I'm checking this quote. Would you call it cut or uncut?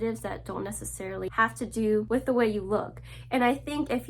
cut